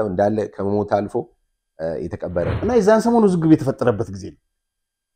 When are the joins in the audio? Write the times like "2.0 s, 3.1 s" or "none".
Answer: 2.6 s